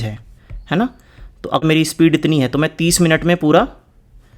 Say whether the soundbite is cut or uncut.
cut